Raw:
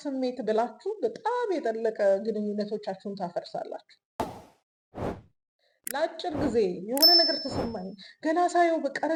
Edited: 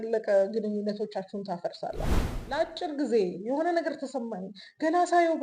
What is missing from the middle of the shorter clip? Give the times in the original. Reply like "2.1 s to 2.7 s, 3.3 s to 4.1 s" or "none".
3.9 s to 5.7 s